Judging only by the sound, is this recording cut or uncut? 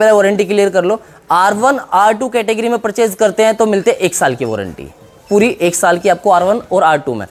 uncut